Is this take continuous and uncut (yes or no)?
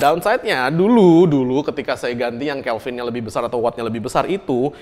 yes